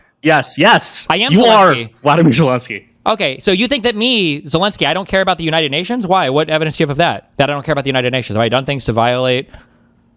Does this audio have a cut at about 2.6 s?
no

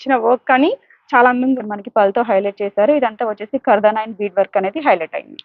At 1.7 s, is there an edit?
yes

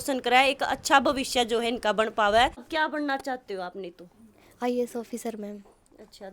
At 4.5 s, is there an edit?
no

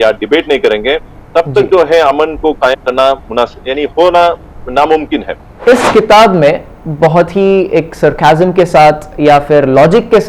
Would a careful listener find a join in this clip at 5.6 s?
yes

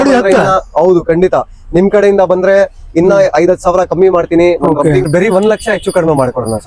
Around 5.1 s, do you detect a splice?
yes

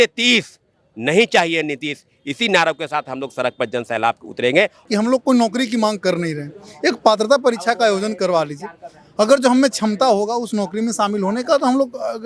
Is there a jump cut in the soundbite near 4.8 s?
yes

